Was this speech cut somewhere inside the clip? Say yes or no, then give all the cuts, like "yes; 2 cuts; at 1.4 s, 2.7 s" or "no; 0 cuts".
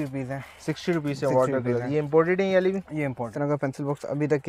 yes; 1 cut; at 3.3 s